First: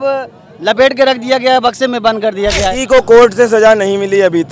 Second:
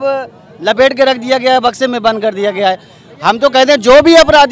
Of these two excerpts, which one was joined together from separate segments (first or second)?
first